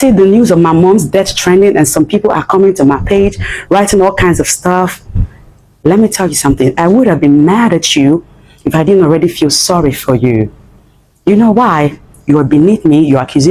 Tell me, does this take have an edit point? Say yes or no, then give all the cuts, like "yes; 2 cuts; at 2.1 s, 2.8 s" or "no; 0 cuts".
no; 0 cuts